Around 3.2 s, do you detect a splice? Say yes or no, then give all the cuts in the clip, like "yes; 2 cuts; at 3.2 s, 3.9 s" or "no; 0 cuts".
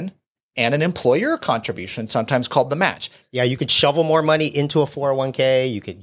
yes; 1 cut; at 3.2 s